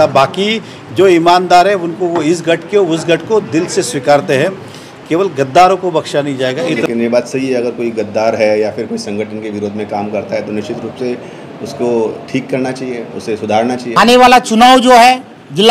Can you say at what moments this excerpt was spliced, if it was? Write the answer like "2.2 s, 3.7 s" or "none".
6.8 s, 13.9 s